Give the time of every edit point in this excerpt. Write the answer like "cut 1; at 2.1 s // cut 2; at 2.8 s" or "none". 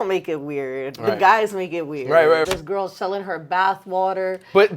cut 1; at 2.5 s